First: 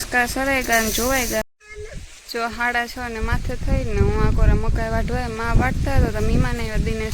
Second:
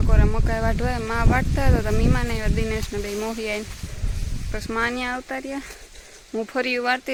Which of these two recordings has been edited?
first; 1 cut; at 1.5 s

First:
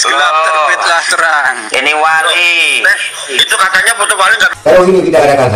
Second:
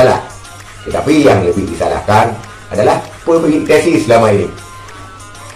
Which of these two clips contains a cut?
first; 1 cut; at 4.5 s

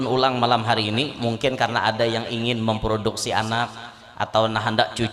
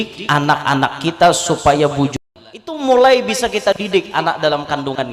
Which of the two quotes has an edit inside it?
second; 1 cut; at 2.2 s

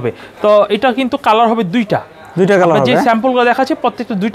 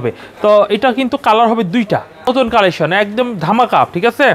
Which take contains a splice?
second; 1 cut; at 2.3 s

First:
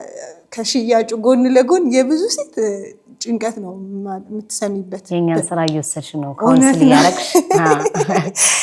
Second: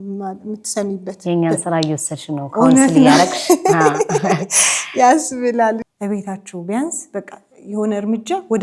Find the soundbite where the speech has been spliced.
second; 1 cut; at 5.8 s

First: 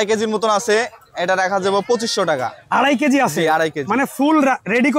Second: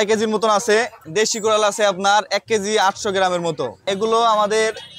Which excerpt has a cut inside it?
second; 2 cuts; at 1.0 s, 3.8 s

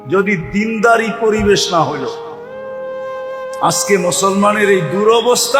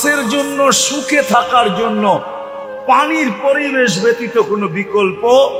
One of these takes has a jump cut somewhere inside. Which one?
first; 2 cuts; at 2.1 s, 3.6 s

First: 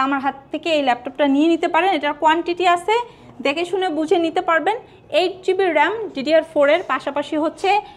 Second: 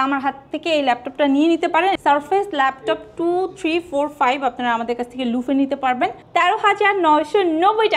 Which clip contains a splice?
second; 2 cuts; at 2.0 s, 6.2 s

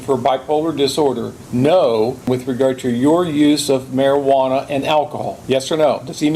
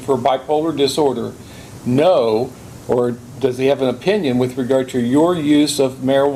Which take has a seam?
first; 3 cuts; at 1.3 s, 2.3 s, 5.3 s

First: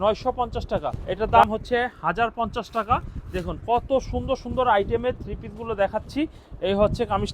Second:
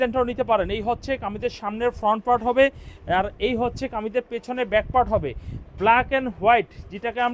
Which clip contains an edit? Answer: first; 1 cut; at 1.0 s

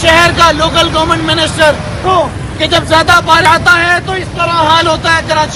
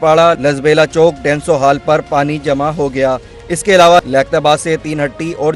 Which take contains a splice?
first; 1 cut; at 3.5 s

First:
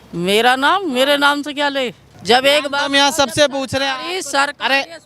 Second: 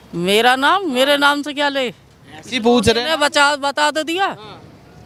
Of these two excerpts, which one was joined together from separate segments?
first; 1 cut; at 2.1 s

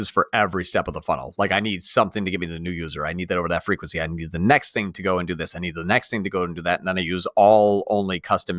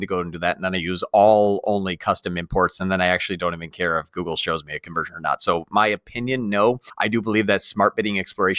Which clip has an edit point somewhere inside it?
second; 1 cut; at 6.9 s

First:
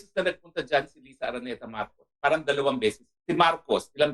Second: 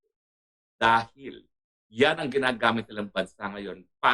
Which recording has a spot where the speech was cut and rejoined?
first; 1 cut; at 3.1 s

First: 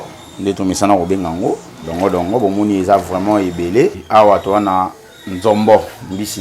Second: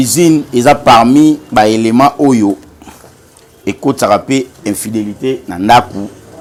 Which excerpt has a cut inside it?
first; 1 cut; at 4.0 s

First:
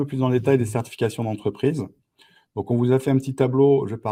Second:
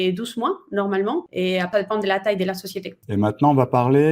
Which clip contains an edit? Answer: second; 2 cuts; at 1.6 s, 2.9 s

